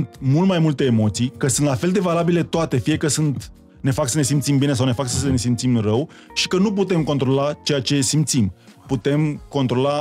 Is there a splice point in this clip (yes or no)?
no